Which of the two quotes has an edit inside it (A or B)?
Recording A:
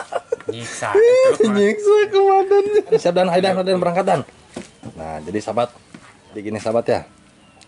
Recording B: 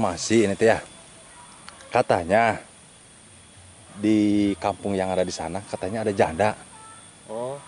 A